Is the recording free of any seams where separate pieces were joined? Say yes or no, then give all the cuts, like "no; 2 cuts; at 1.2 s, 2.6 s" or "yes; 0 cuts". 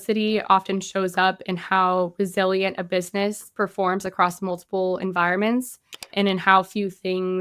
no; 1 cut; at 6.1 s